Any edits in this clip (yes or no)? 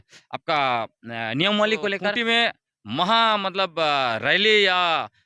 yes